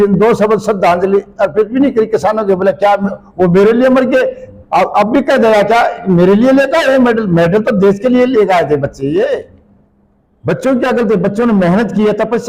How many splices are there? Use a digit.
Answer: 0